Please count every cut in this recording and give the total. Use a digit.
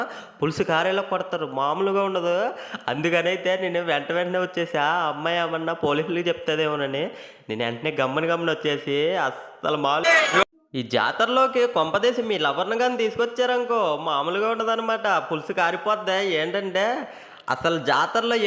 1